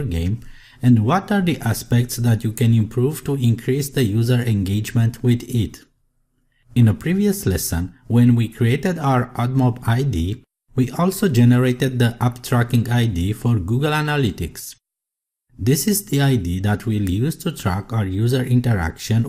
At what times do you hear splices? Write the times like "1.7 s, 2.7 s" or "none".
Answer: 9.2 s